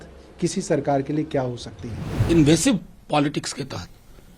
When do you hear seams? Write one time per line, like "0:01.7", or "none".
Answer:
0:02.2